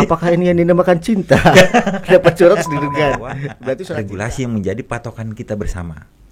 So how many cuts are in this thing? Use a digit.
1